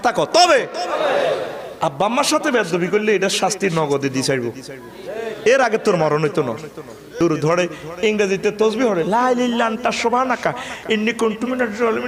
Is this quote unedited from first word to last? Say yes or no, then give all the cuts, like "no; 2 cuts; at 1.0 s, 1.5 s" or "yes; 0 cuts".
no; 1 cut; at 7.1 s